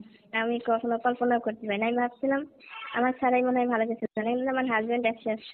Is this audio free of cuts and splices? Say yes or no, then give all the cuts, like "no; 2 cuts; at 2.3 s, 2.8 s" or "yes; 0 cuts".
yes; 0 cuts